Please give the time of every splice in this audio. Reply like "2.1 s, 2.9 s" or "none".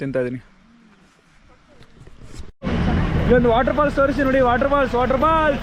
2.5 s